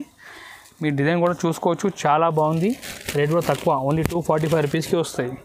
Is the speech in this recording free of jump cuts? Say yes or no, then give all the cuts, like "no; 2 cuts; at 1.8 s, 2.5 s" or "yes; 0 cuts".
yes; 0 cuts